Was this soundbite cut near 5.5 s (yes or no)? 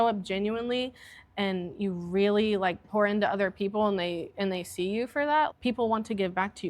yes